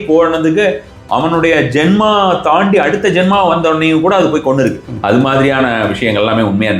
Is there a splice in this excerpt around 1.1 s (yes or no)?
no